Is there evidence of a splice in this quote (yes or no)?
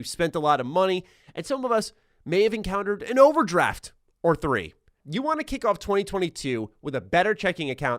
yes